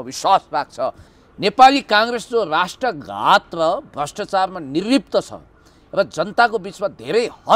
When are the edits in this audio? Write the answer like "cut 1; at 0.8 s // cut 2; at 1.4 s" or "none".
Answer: cut 1; at 1.1 s